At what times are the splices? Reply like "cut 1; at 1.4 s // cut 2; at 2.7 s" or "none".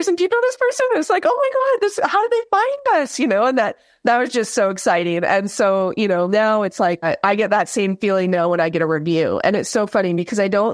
cut 1; at 7.0 s